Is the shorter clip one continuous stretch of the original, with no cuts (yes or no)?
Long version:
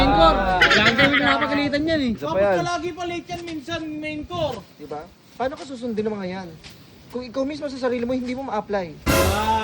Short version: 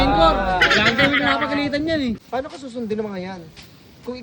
no